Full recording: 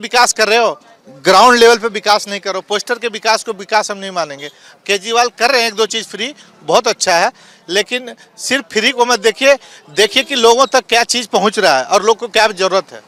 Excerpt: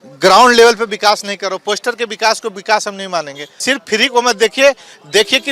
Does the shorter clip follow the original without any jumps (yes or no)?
no